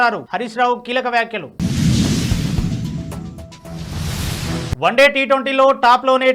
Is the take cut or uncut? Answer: cut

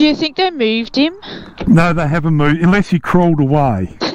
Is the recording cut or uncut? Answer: uncut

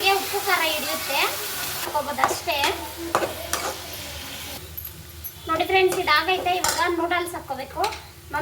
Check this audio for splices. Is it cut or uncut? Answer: cut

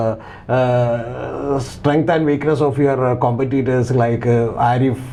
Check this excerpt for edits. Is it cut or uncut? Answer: uncut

